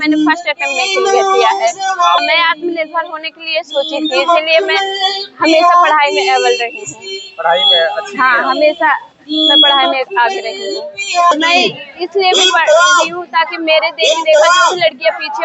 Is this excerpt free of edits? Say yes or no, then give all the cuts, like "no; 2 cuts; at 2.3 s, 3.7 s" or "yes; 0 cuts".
no; 2 cuts; at 2.2 s, 11.3 s